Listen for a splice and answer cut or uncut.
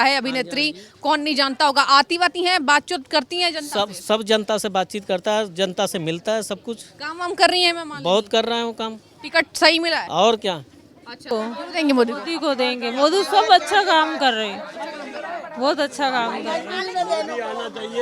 cut